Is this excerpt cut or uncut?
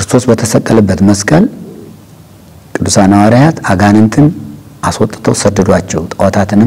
uncut